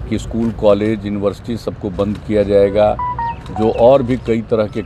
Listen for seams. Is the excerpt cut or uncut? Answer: uncut